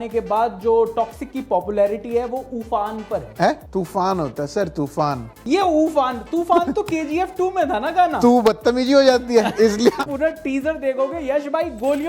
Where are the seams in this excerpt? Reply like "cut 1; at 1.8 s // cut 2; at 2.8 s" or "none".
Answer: cut 1; at 3.6 s // cut 2; at 5.4 s // cut 3; at 10.0 s